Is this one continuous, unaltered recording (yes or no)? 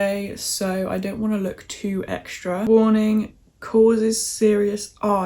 no